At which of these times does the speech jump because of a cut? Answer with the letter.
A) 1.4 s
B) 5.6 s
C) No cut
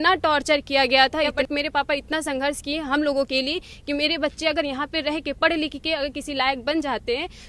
A